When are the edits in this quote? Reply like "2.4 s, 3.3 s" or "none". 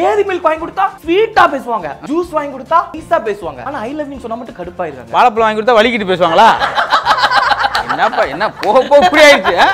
1.0 s, 2.0 s, 3.5 s